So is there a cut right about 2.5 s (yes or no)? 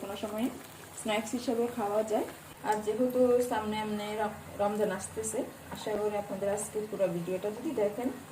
yes